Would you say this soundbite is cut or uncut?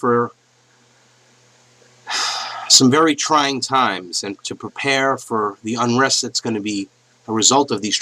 cut